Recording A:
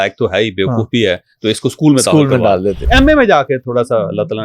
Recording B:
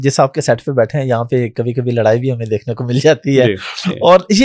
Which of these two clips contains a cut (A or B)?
A